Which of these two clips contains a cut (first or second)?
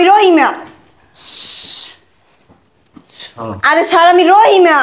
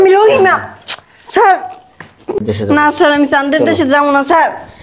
second